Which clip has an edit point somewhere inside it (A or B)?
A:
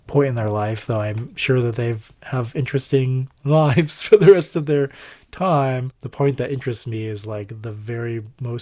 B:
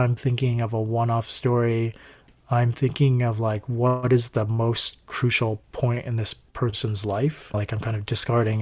B